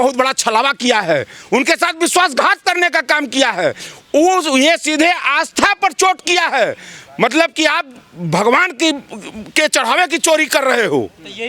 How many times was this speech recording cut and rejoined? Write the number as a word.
zero